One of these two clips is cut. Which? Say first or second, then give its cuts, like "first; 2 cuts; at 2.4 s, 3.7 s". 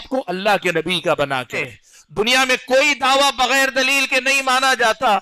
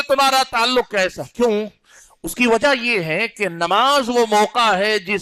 first; 1 cut; at 1.6 s